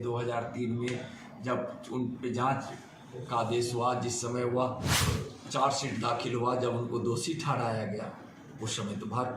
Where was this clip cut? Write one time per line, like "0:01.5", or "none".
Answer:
0:04.9